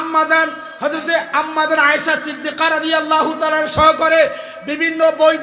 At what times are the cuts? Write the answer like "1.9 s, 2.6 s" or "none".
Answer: none